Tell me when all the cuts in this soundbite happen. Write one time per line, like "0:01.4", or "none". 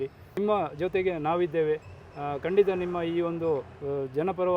none